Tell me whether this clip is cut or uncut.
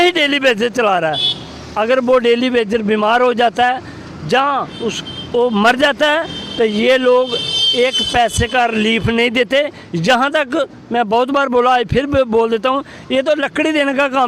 uncut